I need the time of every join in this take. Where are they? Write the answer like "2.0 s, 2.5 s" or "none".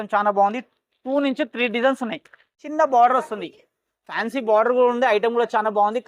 2.6 s